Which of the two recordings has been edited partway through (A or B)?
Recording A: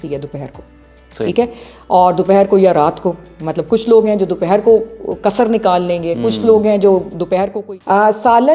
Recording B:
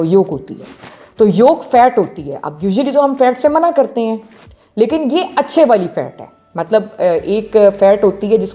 A